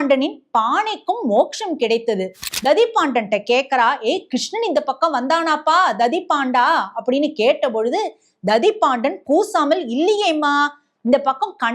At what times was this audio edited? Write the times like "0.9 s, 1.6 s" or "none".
2.5 s

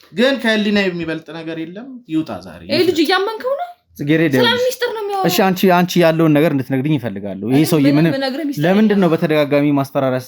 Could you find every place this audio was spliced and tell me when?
none

